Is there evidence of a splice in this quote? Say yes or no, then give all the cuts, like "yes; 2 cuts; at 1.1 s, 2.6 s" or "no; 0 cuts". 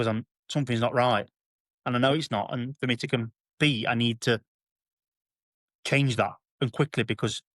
no; 0 cuts